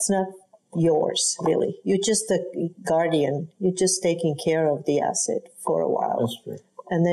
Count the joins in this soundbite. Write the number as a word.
zero